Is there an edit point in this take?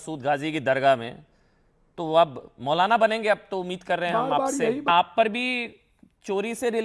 yes; 1 cut; at 4.9 s

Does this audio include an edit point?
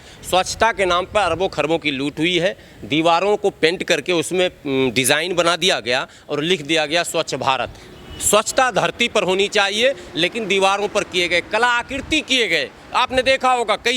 no; 0 cuts

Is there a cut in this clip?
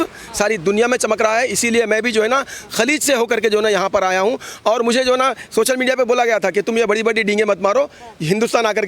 no; 0 cuts

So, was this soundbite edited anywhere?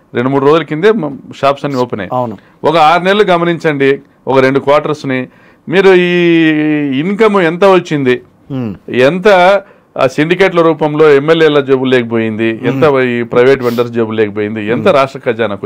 no; 0 cuts

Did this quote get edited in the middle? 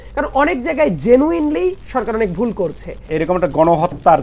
yes; 1 cut; at 3.1 s

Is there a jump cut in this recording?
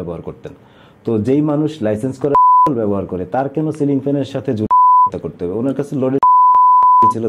no; 0 cuts

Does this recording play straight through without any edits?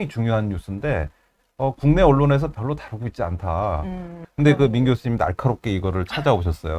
no; 1 cut; at 4.2 s

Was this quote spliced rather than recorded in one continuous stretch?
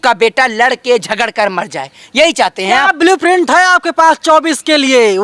no; 0 cuts

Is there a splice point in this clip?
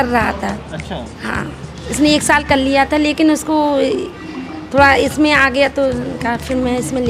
no; 0 cuts

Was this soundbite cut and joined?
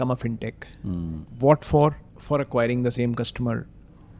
yes; 2 cuts; at 1.2 s, 2.1 s

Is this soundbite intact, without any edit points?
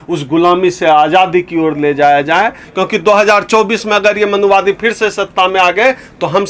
no; 1 cut; at 2.6 s

